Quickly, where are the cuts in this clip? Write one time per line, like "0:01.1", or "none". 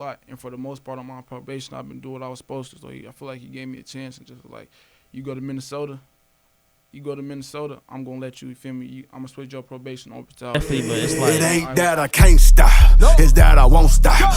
0:10.5

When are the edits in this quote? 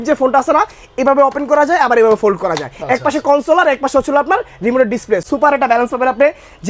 none

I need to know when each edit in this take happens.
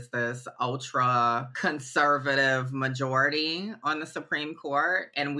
0:01.5

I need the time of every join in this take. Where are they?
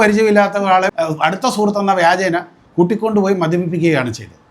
0:00.9

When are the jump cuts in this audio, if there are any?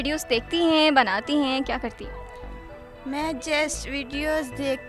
none

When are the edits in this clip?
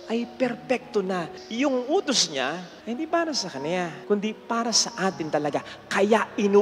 0:01.4
0:02.7
0:04.0

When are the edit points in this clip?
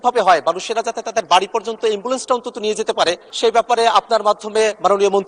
0:03.3

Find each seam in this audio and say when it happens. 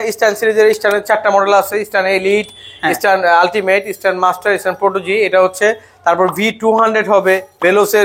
none

